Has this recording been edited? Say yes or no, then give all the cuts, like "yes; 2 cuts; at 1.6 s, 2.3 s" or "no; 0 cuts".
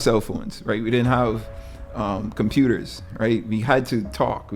no; 0 cuts